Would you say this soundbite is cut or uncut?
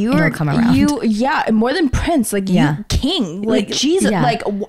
uncut